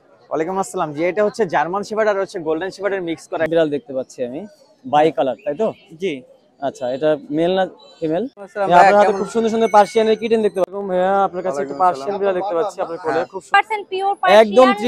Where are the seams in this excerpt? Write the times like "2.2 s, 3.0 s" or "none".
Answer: 3.5 s, 8.4 s, 10.7 s, 13.6 s